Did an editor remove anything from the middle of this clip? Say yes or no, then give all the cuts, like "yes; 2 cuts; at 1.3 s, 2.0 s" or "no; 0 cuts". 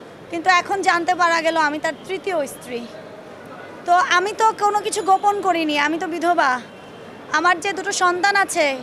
no; 0 cuts